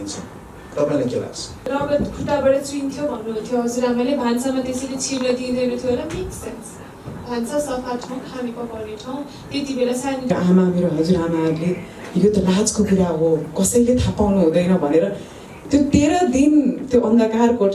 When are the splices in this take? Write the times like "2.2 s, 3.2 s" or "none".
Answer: 1.6 s, 10.3 s